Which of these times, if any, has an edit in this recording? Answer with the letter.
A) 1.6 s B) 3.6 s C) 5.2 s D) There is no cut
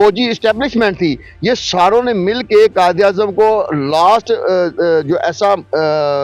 D